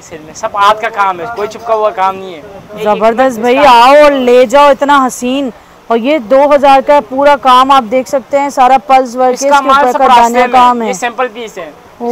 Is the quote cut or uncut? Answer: uncut